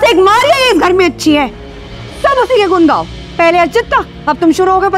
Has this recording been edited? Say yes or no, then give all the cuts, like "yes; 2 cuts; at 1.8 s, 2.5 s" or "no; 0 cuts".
no; 0 cuts